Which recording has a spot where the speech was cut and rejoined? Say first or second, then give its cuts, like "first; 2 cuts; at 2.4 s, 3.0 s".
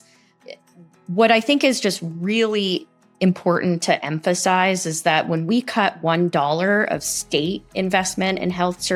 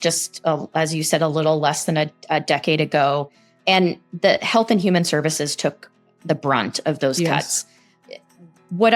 second; 1 cut; at 3.6 s